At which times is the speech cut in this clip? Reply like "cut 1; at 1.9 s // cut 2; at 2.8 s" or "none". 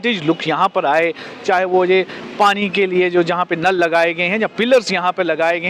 none